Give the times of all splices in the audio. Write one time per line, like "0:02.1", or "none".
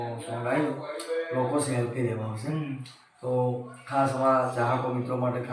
none